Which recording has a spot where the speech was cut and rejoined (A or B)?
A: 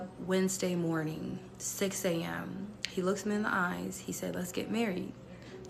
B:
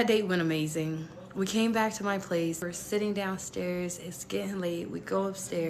B